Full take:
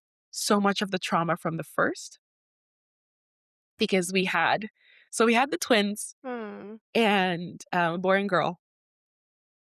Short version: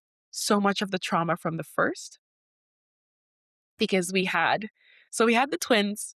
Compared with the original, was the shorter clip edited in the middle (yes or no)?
no